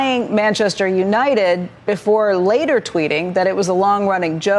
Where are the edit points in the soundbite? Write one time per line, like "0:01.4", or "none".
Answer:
none